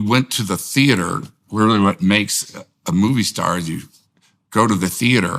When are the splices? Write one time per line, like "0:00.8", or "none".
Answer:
none